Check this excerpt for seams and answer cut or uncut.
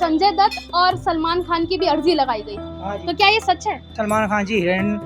cut